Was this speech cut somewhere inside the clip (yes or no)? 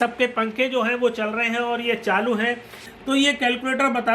yes